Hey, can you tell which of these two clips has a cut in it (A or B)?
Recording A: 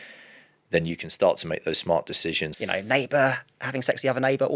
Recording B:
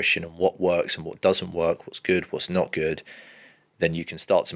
A